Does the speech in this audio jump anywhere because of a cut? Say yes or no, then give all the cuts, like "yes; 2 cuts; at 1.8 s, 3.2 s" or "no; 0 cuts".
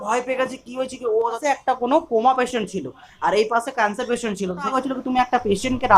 yes; 2 cuts; at 1.4 s, 4.7 s